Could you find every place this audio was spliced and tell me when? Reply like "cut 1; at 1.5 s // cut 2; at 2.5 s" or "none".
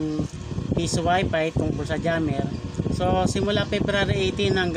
none